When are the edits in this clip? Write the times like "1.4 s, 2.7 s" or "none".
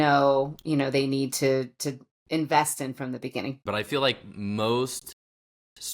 3.6 s